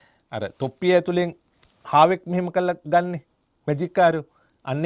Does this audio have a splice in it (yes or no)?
no